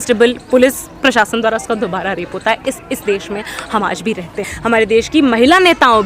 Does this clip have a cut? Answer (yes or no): yes